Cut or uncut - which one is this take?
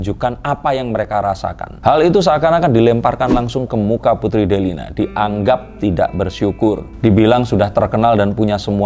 uncut